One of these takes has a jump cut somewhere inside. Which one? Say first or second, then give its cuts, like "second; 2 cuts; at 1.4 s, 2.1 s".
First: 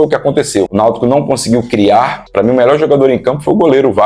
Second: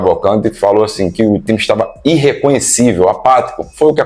first; 2 cuts; at 1.1 s, 2.2 s